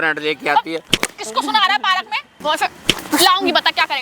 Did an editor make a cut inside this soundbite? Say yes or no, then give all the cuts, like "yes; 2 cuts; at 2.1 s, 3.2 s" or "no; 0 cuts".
yes; 1 cut; at 2.2 s